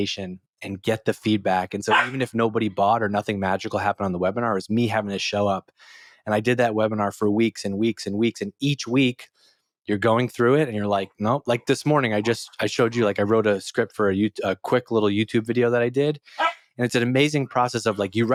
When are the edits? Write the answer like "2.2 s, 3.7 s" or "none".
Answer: none